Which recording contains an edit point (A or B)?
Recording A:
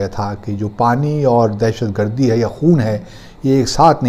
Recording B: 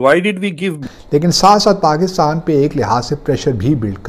B